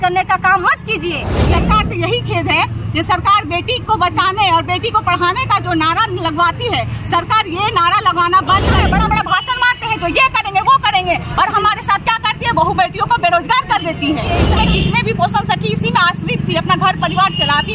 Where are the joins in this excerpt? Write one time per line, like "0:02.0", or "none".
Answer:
0:01.3
0:08.8
0:14.4